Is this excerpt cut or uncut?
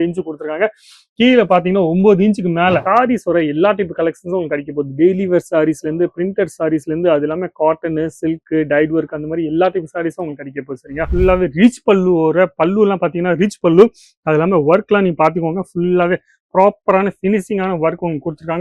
cut